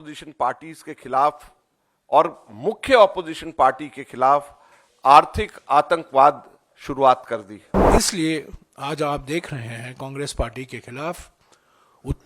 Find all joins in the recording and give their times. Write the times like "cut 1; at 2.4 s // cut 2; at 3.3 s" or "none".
cut 1; at 7.9 s